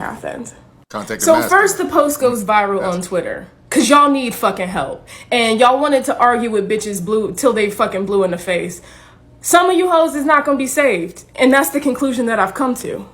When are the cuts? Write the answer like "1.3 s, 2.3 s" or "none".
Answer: 7.6 s